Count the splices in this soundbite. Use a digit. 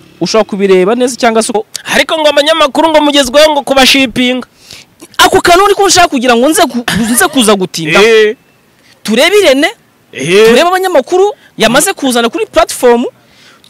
1